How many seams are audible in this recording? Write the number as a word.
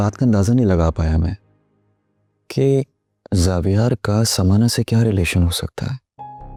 zero